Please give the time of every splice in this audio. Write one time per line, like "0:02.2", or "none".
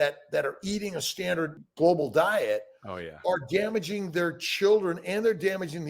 0:01.6